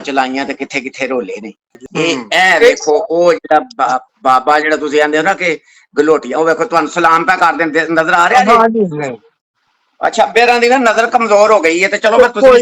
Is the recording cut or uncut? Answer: cut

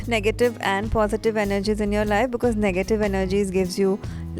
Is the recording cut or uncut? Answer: uncut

